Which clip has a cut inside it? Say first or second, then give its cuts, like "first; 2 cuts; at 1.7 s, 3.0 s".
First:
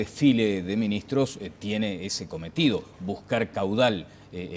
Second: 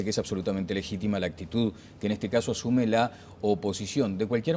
second; 1 cut; at 3.3 s